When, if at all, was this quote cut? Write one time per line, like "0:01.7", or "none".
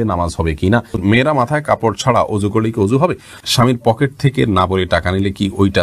0:01.0
0:03.4